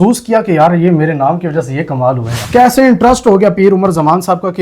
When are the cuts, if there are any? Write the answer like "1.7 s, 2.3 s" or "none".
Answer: 2.3 s